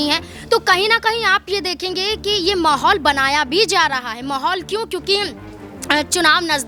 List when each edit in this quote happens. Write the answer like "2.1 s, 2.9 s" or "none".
none